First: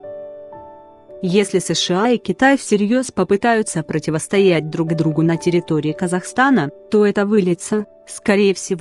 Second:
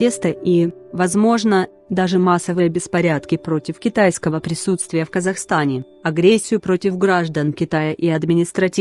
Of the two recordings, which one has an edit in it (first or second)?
first